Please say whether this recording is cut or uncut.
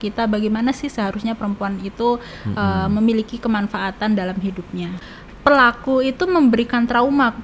cut